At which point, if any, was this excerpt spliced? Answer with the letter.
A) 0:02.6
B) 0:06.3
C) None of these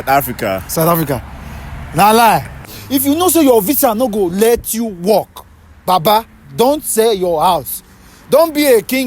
A